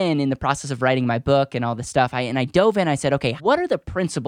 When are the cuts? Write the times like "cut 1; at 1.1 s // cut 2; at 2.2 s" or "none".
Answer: cut 1; at 3.4 s